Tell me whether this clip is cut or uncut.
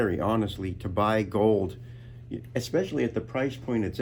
uncut